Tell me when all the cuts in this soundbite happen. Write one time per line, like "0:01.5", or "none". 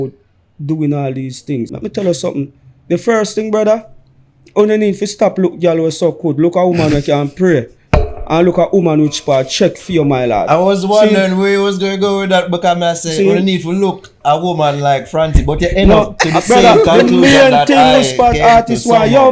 0:01.7